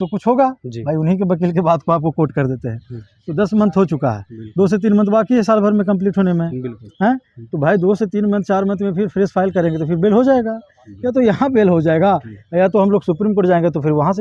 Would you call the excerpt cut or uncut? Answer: uncut